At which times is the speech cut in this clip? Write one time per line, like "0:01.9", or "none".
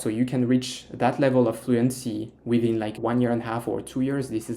0:03.0